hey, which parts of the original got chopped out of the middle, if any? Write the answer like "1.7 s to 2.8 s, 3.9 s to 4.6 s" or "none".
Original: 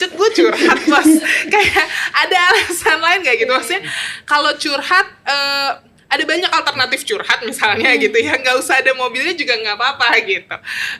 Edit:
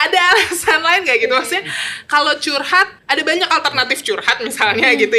5.1 s to 6.0 s